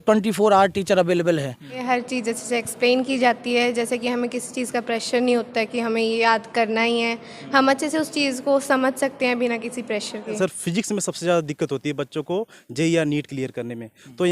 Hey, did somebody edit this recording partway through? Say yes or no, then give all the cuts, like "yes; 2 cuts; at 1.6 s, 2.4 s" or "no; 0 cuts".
yes; 2 cuts; at 1.8 s, 10.4 s